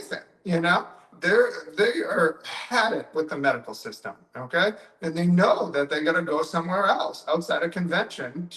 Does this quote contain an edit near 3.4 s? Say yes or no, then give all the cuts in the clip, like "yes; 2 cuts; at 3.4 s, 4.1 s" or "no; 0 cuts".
no; 0 cuts